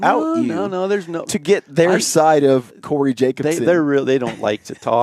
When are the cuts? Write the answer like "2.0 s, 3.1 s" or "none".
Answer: none